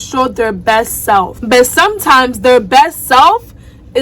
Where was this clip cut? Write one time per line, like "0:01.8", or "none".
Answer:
0:01.4